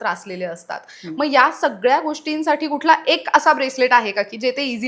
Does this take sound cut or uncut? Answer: uncut